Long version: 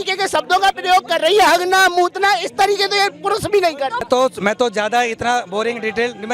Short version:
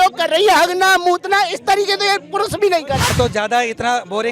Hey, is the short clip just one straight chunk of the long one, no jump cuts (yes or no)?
no